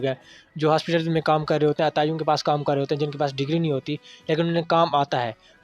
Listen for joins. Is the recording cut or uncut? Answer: uncut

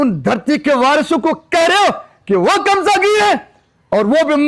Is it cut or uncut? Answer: uncut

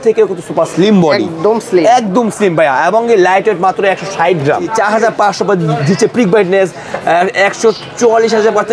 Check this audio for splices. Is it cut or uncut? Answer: cut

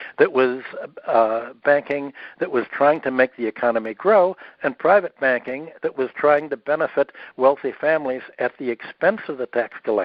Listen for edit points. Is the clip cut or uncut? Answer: uncut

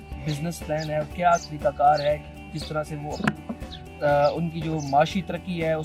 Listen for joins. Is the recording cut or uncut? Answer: uncut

